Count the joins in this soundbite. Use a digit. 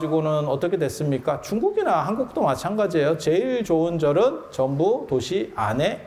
0